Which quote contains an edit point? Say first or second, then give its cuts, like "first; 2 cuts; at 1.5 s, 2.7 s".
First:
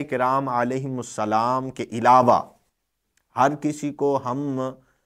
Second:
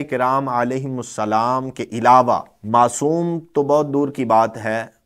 second; 1 cut; at 2.5 s